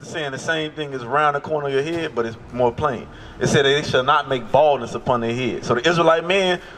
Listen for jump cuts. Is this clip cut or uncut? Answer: uncut